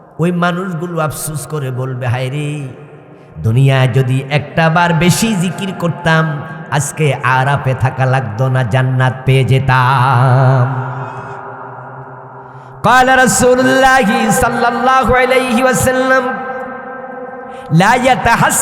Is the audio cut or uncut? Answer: cut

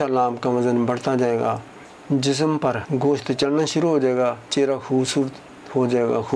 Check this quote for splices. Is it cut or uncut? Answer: cut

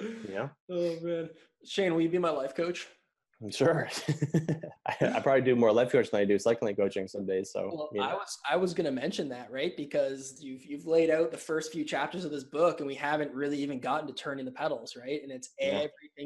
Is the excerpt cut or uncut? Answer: cut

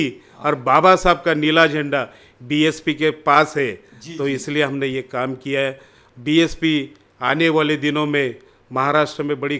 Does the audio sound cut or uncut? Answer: cut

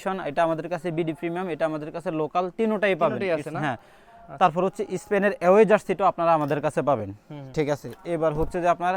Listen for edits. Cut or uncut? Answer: uncut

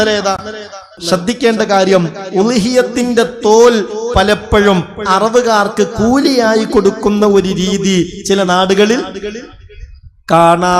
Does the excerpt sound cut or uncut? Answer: cut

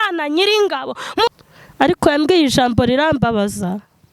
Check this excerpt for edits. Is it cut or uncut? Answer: cut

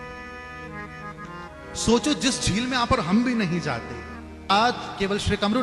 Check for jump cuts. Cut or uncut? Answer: cut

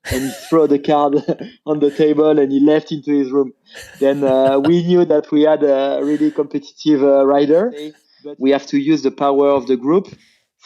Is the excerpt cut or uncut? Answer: cut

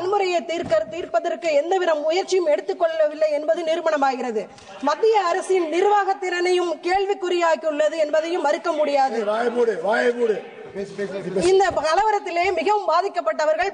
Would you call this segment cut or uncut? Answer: uncut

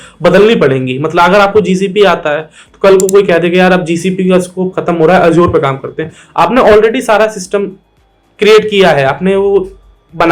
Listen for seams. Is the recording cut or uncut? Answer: uncut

